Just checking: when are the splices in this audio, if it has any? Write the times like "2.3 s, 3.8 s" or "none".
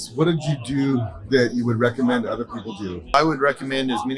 0.9 s, 3.1 s